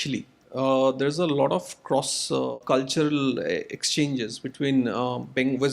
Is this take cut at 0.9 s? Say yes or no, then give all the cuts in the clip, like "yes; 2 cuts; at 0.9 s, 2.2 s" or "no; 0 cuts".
no; 1 cut; at 2.6 s